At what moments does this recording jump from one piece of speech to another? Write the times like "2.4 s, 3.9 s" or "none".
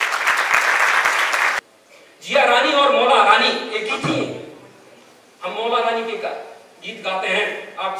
1.6 s